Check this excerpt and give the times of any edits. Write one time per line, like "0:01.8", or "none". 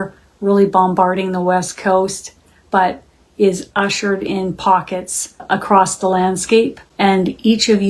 0:05.4
0:06.8